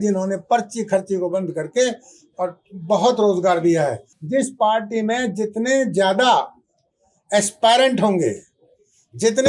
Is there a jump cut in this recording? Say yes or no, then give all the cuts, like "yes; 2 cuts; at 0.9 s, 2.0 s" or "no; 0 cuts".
yes; 1 cut; at 4.1 s